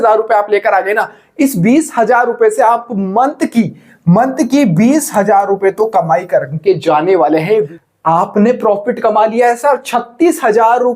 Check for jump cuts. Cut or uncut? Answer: cut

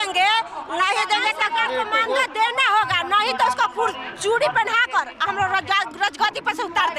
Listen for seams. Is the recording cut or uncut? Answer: uncut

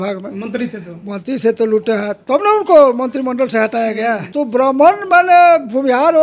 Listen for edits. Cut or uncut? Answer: cut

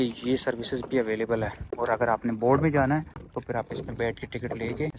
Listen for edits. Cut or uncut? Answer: uncut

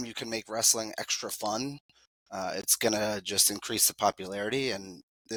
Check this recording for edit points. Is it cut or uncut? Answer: uncut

